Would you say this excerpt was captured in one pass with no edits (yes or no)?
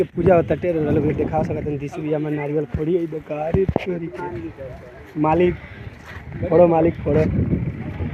yes